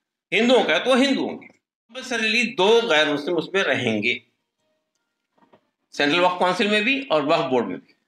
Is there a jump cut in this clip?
yes; 1 cut; at 2.1 s

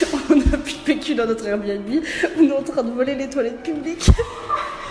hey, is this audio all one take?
yes; 0 cuts

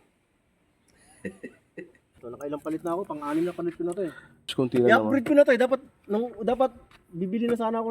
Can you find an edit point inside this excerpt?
yes; 2 cuts; at 2.3 s, 4.5 s

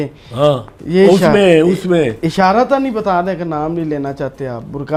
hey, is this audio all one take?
yes; 0 cuts

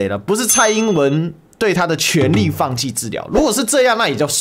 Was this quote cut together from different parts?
no; 0 cuts

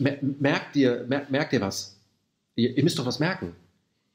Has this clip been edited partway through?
yes; 1 cut; at 1.0 s

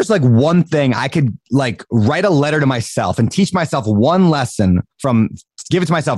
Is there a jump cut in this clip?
no; 0 cuts

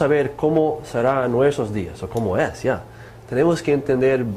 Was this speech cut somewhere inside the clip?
yes; 1 cut; at 2.4 s

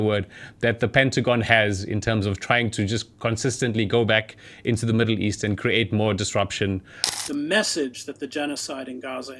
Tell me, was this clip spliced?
yes; 1 cut; at 7.0 s

